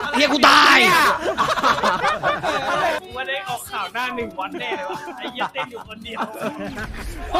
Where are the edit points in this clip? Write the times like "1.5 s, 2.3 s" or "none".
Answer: 3.0 s